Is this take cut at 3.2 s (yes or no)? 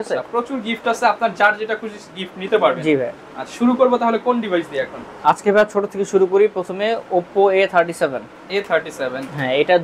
no